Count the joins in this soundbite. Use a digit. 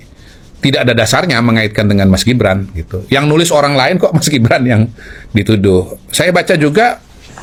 0